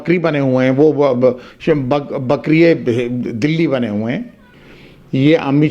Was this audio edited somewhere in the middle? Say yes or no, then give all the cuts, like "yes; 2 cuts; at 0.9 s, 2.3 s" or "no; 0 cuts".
yes; 1 cut; at 4.4 s